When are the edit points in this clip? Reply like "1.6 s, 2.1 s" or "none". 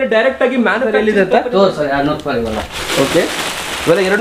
0.9 s

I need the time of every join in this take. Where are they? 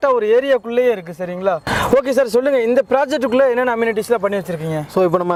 none

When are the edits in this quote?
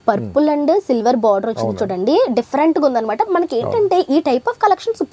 none

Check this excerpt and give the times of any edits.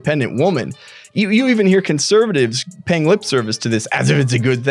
none

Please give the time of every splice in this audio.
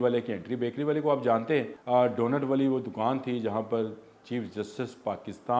1.8 s

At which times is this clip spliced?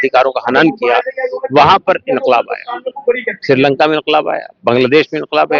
none

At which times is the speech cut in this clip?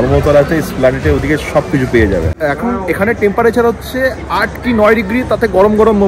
2.3 s

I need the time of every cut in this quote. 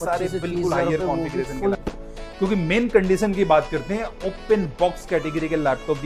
1.8 s

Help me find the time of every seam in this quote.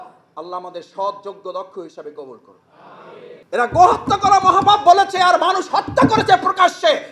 3.3 s

